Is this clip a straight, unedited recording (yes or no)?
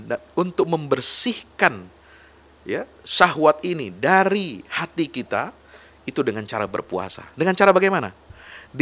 yes